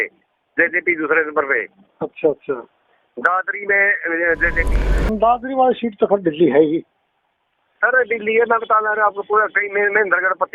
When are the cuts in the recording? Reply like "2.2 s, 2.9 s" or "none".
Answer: 5.1 s